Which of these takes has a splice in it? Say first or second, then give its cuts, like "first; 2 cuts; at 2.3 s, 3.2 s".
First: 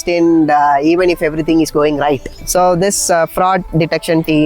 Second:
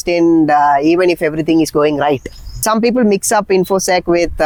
first; 1 cut; at 2.4 s